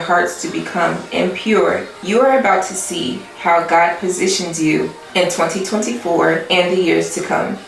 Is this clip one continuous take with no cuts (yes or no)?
no